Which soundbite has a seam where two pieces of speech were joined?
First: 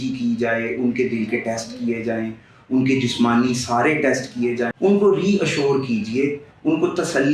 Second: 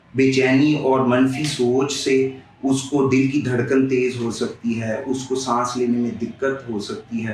first; 1 cut; at 4.7 s

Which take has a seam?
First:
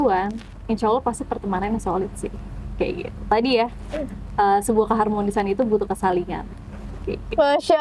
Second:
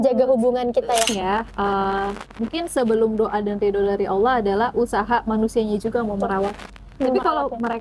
second; 1 cut; at 1.1 s

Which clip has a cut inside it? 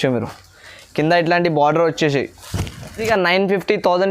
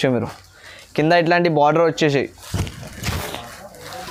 first; 1 cut; at 3.0 s

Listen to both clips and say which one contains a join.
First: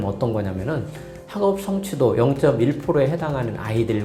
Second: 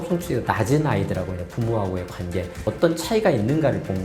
second; 1 cut; at 2.6 s

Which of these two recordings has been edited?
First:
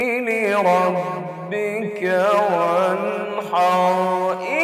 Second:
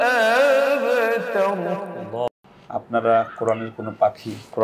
second; 1 cut; at 2.3 s

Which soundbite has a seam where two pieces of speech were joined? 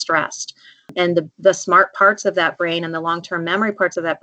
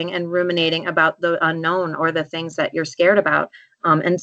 first; 1 cut; at 0.9 s

